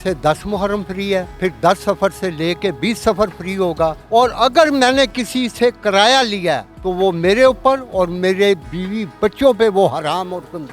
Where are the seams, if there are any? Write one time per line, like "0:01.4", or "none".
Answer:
0:01.4
0:04.0
0:06.7
0:08.8